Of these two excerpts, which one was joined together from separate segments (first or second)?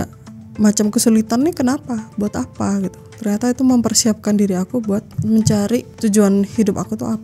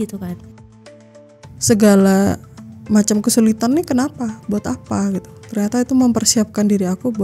second